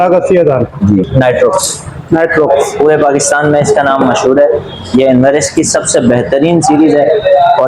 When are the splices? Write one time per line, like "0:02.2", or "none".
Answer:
0:01.1